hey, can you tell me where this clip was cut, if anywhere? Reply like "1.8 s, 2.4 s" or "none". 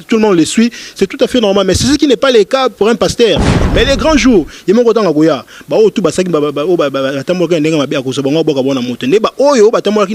3.7 s